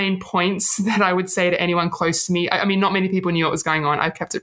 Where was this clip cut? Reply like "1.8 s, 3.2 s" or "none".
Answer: none

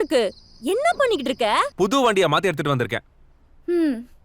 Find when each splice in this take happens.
1.7 s

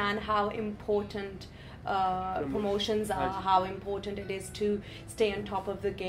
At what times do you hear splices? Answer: none

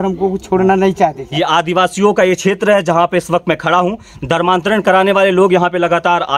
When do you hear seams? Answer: 1.2 s

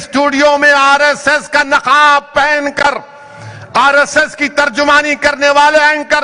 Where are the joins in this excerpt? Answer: none

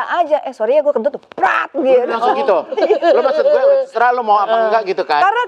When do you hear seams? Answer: none

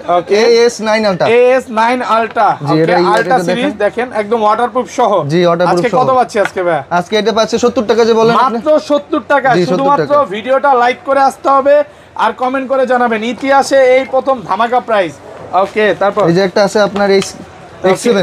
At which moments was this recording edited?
none

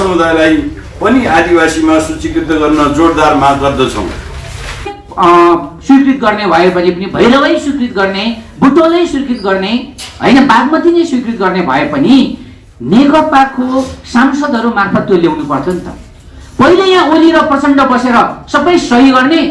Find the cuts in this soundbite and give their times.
5.0 s

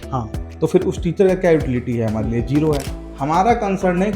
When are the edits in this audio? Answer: 2.9 s

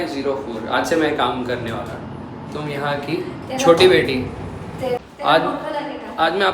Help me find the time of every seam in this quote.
5.0 s

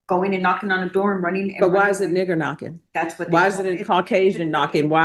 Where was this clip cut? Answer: none

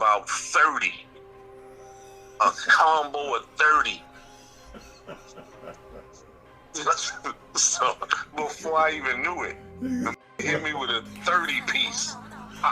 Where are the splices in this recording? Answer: none

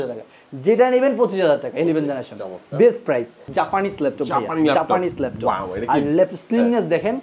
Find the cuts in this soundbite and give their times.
3.4 s

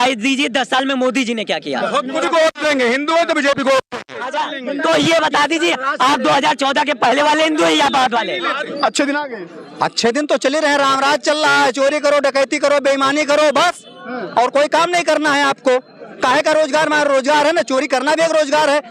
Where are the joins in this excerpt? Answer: 2.2 s, 8.7 s

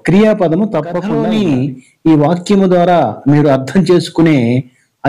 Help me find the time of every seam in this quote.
1.1 s

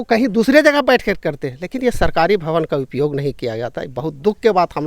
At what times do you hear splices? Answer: none

